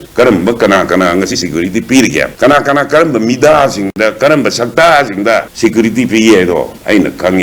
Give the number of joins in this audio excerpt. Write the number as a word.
zero